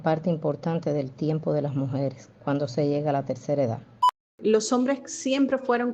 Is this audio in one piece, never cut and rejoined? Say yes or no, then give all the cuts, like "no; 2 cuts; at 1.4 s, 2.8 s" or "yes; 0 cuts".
no; 1 cut; at 4.0 s